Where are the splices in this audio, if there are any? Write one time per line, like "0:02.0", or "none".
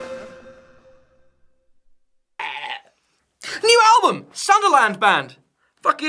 none